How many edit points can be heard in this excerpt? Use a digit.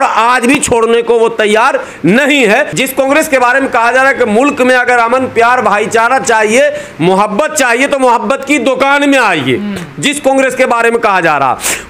1